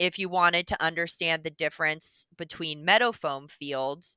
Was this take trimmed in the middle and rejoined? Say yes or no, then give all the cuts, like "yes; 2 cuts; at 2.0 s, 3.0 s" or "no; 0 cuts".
no; 0 cuts